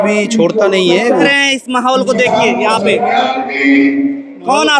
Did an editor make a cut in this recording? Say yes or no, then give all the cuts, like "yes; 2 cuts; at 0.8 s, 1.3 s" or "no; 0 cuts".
yes; 1 cut; at 1.3 s